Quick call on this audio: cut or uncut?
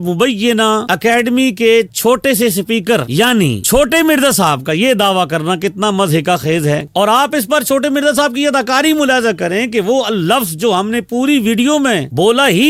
uncut